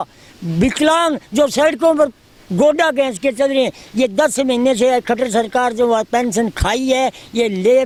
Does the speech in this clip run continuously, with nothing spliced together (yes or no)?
yes